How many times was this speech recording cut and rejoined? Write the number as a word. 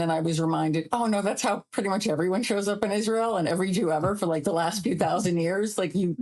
zero